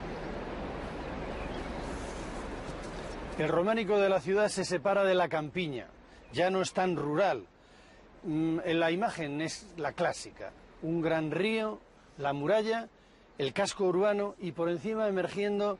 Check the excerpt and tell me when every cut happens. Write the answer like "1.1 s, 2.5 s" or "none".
1.0 s